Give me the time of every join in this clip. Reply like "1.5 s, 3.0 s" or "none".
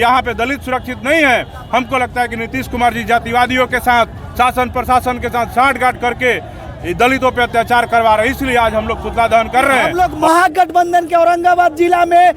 9.9 s